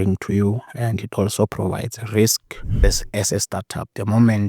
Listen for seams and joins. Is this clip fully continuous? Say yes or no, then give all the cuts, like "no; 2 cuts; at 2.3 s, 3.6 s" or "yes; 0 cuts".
no; 1 cut; at 2.8 s